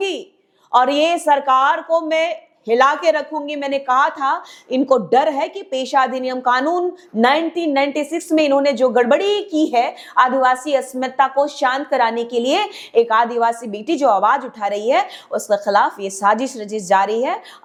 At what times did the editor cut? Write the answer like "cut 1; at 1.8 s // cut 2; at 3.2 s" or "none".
none